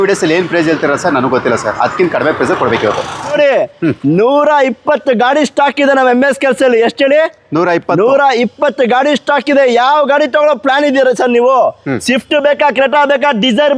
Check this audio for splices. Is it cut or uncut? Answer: cut